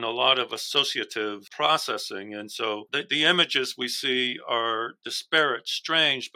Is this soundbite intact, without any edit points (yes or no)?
no